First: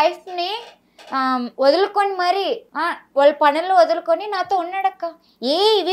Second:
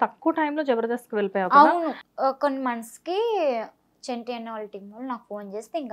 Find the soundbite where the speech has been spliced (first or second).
second